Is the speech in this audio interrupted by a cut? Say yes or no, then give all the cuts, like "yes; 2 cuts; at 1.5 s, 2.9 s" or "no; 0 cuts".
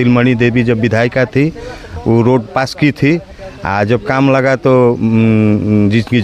no; 0 cuts